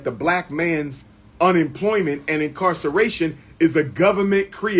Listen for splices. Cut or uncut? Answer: uncut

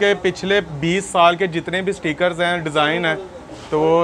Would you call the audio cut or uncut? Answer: uncut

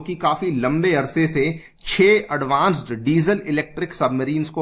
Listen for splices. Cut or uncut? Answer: uncut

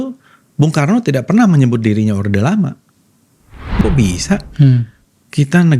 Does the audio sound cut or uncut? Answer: cut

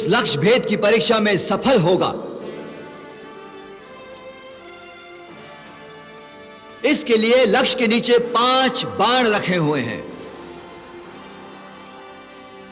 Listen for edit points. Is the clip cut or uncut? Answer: uncut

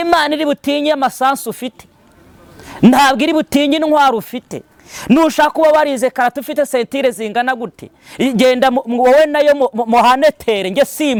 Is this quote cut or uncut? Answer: uncut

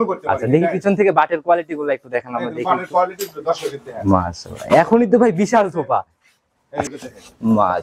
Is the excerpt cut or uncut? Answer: cut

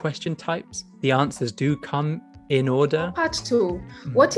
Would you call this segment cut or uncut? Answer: cut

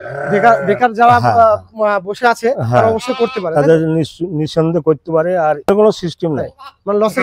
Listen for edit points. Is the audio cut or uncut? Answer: cut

